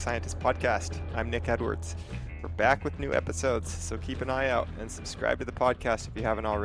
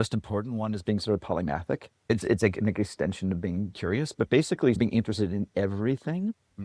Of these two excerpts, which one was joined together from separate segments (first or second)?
second